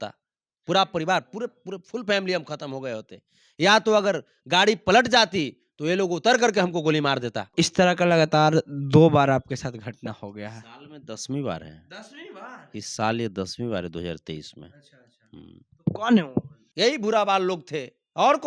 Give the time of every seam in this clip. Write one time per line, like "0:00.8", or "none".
0:07.5
0:16.6